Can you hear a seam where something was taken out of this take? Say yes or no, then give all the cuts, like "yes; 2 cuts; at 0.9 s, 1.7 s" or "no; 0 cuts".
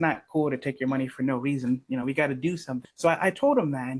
yes; 1 cut; at 2.7 s